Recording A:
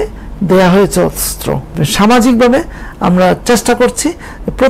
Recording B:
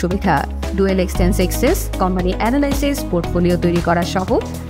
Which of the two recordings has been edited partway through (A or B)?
A